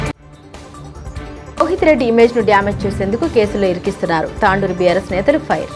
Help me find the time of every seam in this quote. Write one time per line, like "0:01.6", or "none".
0:01.5